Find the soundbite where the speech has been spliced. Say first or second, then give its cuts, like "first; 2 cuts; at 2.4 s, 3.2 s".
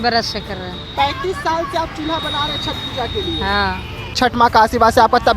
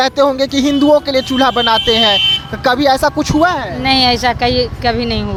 first; 1 cut; at 4.2 s